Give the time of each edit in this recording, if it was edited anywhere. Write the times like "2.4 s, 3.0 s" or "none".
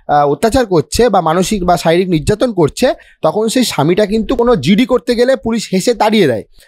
4.4 s

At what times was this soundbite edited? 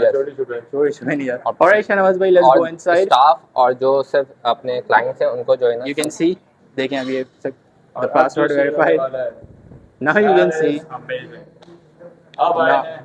none

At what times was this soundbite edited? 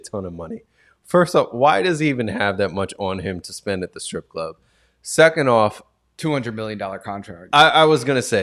none

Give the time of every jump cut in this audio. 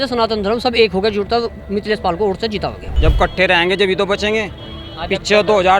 2.8 s

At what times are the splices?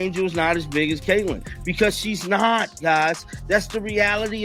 none

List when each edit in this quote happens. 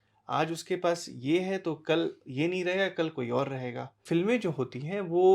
4.0 s

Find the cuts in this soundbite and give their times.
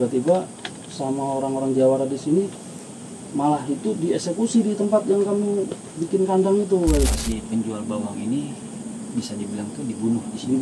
7.1 s

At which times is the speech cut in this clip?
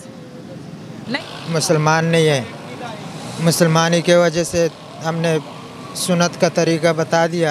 1.0 s

